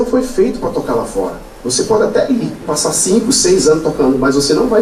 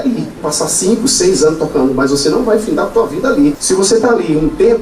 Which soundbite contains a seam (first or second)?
second